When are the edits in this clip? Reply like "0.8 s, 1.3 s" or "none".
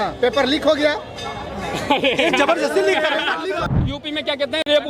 3.6 s